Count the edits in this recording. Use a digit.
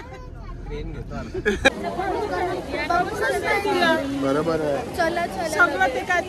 1